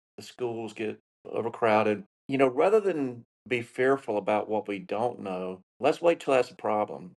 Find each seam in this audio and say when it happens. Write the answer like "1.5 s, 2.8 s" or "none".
2.2 s, 5.6 s